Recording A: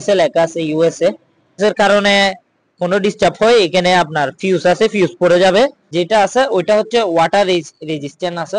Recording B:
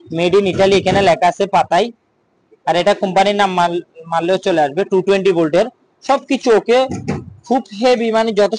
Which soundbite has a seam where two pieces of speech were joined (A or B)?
A